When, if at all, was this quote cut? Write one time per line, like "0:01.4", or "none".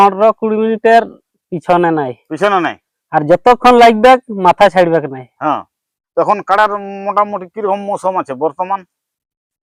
none

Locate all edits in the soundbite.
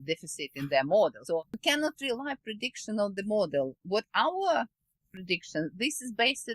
0:01.2

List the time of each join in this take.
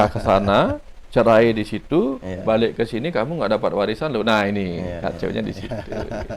none

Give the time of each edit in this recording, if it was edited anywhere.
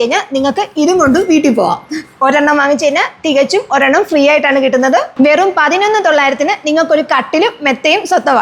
0:05.1

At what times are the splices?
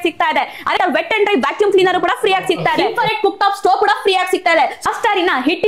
0:00.8
0:02.8
0:04.8

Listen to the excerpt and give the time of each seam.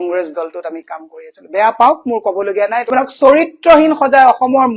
0:02.9

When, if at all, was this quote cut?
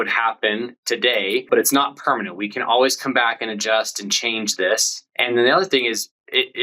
0:01.4
0:05.0

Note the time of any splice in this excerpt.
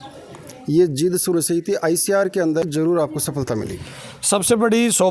0:02.6

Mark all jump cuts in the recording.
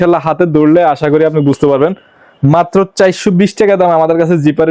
none

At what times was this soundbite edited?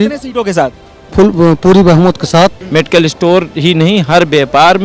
0:02.6

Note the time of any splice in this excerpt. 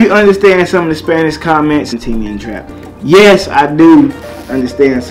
0:01.9

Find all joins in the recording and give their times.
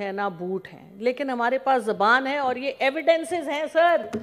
none

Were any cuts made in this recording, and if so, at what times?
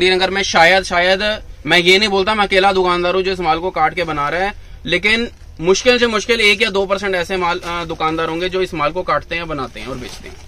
none

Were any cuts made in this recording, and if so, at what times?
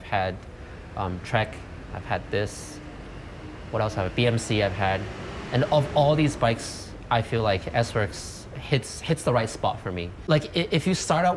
0:10.1

